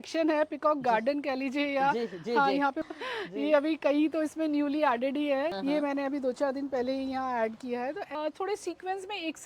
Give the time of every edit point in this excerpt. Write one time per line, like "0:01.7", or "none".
0:02.8
0:05.5
0:08.1